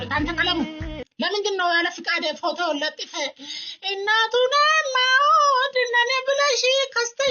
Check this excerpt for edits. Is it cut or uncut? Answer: uncut